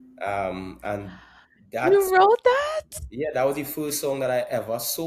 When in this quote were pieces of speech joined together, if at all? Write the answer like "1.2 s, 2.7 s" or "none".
none